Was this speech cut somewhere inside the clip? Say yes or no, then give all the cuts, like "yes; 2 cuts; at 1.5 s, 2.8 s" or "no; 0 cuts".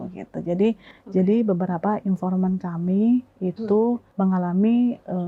yes; 2 cuts; at 0.9 s, 4.1 s